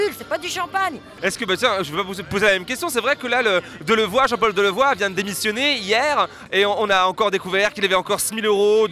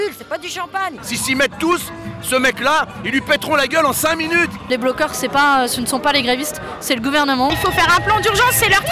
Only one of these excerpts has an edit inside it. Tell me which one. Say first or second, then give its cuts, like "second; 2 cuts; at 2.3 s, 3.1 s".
second; 3 cuts; at 1.0 s, 4.7 s, 7.5 s